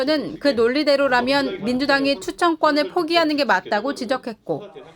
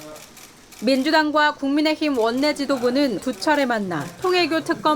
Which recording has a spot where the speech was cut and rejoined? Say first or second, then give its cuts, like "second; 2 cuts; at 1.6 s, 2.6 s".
second; 1 cut; at 3.2 s